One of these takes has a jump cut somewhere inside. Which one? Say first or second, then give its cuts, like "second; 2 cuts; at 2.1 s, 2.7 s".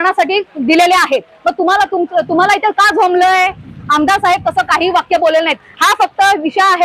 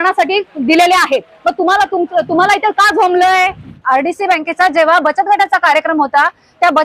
second; 1 cut; at 3.8 s